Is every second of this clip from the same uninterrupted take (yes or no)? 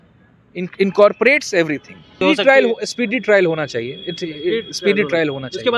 no